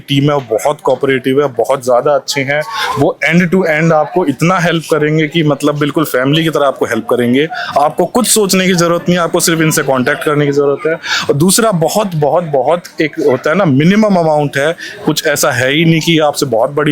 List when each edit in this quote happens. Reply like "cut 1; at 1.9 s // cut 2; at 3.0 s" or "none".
none